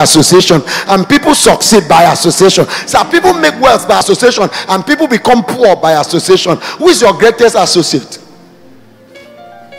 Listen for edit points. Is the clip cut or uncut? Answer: cut